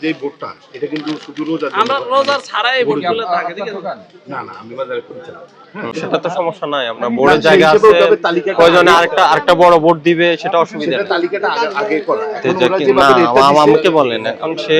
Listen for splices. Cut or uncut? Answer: cut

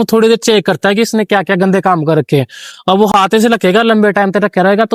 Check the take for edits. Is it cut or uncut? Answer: uncut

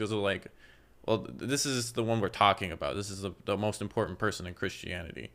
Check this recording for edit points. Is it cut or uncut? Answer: uncut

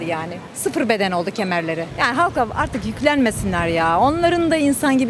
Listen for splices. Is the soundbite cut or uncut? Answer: cut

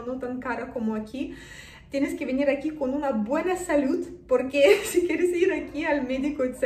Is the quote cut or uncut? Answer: uncut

